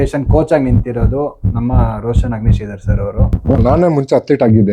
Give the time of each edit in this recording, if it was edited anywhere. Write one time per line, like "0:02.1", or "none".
0:03.4